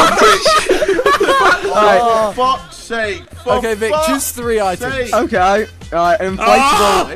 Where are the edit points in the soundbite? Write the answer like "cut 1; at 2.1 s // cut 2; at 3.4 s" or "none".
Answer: cut 1; at 1.4 s